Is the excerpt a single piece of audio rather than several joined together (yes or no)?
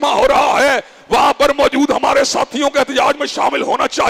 yes